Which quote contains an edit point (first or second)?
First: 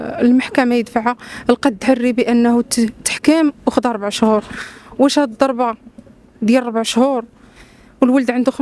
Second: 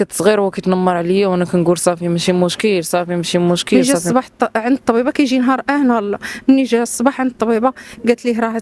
second